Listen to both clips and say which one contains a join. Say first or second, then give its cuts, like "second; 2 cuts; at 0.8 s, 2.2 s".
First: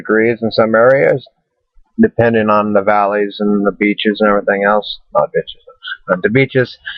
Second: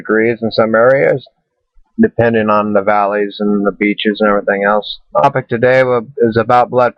first; 1 cut; at 5.2 s